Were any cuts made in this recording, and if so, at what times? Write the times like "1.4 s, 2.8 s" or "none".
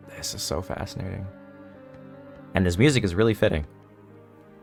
none

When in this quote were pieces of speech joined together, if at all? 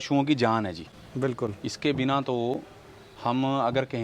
none

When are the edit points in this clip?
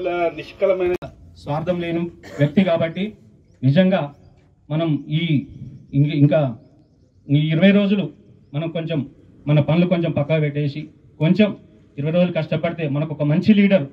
1.0 s

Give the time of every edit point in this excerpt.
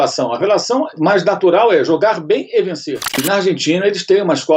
0.9 s, 3.2 s

